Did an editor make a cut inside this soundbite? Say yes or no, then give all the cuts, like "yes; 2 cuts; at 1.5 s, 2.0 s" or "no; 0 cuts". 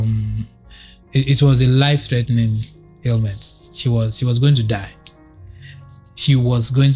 no; 0 cuts